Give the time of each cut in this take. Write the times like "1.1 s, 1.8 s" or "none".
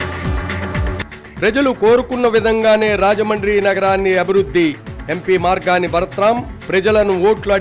0.9 s